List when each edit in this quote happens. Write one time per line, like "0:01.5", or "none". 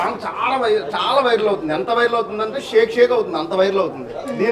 none